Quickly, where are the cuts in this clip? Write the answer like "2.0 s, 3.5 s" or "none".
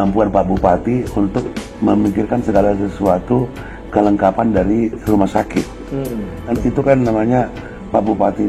6.5 s